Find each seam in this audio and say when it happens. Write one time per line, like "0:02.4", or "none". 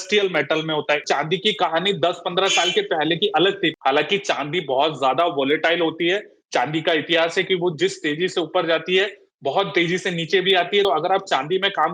0:01.0
0:03.8
0:10.8